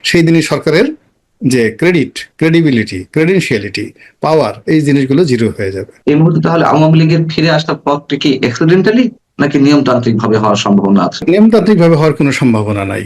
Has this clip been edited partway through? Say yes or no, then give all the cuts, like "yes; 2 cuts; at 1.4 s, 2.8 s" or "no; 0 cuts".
yes; 2 cuts; at 5.9 s, 11.2 s